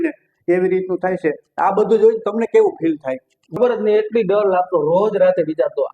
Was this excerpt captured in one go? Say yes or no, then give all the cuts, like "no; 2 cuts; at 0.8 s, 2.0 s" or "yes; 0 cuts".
no; 1 cut; at 3.6 s